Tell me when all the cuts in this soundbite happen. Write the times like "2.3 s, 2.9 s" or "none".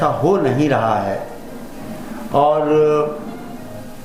none